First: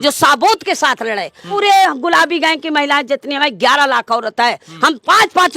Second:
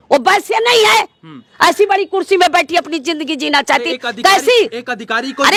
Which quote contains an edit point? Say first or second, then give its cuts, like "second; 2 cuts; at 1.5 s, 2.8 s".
first; 1 cut; at 1.6 s